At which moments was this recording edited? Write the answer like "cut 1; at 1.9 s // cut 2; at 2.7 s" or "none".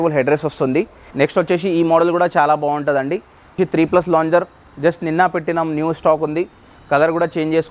cut 1; at 1.0 s // cut 2; at 3.6 s